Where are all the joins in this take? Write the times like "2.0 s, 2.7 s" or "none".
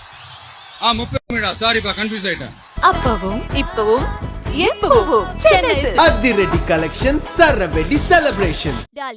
2.6 s